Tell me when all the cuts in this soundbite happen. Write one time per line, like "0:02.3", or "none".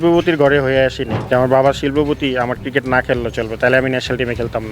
0:01.1